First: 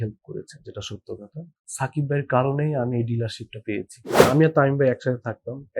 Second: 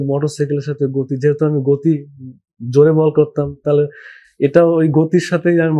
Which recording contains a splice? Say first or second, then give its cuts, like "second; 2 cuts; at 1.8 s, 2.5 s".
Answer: first; 1 cut; at 4.2 s